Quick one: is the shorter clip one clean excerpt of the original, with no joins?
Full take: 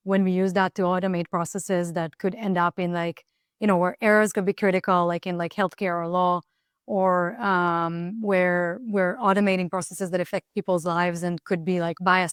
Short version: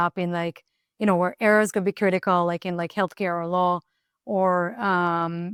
yes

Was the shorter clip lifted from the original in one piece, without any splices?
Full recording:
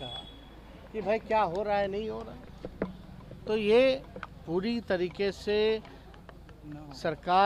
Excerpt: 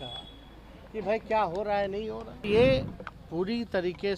no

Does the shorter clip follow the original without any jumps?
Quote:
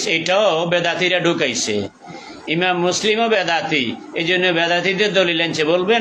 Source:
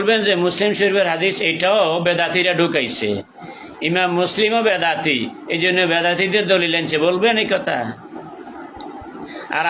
yes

